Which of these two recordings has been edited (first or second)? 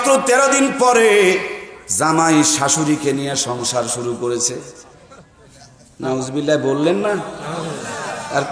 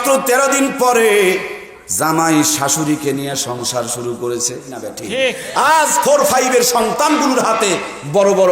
second